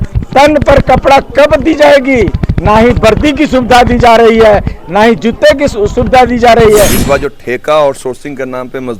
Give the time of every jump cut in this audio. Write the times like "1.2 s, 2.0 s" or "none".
7.0 s